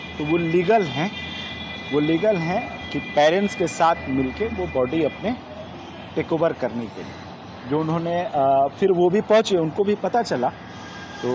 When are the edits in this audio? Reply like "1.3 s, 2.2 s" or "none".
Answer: none